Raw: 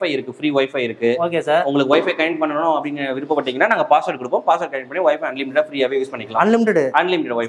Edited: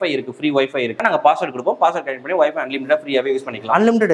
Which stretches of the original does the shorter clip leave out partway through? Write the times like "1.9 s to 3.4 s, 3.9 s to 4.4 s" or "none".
1.0 s to 3.7 s